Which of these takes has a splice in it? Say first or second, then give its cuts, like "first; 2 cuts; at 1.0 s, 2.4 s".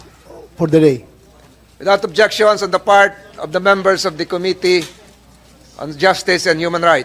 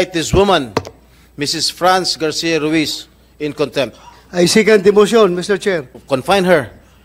second; 1 cut; at 5.9 s